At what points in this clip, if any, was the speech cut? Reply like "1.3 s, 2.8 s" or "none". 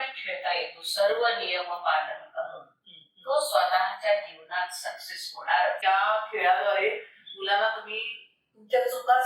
5.8 s